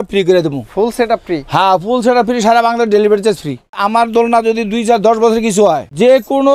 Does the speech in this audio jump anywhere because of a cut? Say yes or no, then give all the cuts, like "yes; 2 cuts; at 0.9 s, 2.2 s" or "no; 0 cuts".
yes; 1 cut; at 3.8 s